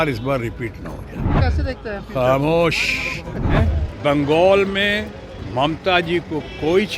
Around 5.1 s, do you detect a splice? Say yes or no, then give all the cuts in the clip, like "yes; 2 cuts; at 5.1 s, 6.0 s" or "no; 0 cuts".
no; 2 cuts; at 1.3 s, 3.5 s